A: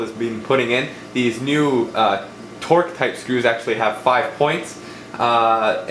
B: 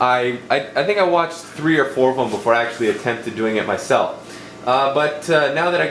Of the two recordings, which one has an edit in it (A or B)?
A